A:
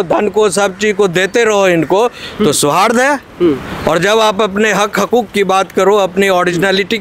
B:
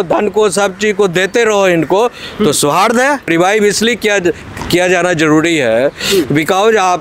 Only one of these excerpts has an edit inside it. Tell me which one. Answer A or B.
B